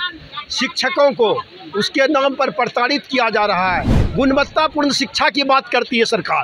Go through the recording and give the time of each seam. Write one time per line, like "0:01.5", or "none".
0:04.0